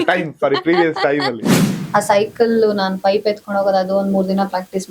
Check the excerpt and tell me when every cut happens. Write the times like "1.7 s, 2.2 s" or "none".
1.7 s

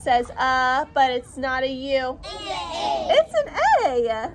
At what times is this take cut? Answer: none

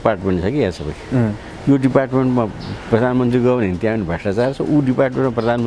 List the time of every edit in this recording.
none

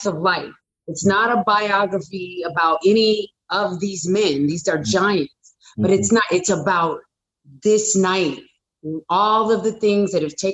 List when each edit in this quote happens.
none

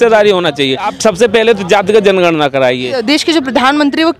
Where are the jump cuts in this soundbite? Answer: 0.9 s, 3.0 s

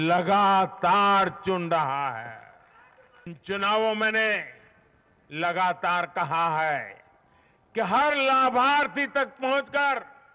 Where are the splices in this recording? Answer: 3.3 s

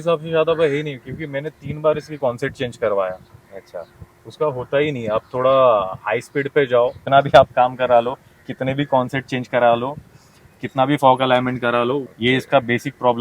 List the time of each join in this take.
7.0 s, 12.0 s

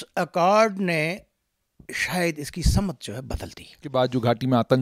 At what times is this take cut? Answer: 3.8 s

